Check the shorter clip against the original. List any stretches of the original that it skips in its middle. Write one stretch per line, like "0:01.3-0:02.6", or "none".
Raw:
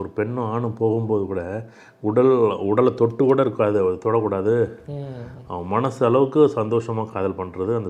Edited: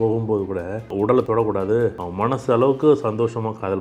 0:02.0-0:04.0
0:04.8-0:05.5